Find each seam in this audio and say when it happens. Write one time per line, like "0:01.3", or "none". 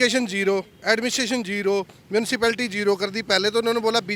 none